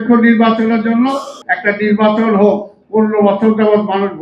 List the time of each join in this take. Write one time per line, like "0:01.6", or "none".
0:01.4

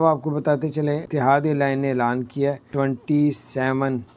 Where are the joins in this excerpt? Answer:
0:01.1
0:02.6

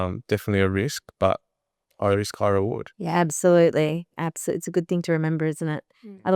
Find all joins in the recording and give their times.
0:02.9

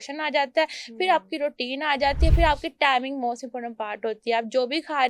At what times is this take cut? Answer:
none

